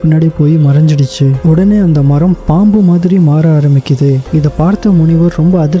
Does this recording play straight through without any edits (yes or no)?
yes